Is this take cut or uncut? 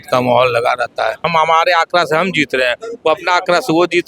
cut